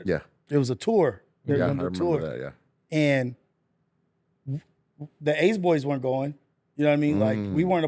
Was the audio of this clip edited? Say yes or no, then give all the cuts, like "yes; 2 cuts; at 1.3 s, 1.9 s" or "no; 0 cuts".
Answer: no; 0 cuts